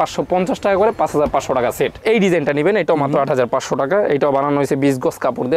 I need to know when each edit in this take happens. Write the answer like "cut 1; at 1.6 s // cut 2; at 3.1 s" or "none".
cut 1; at 2.0 s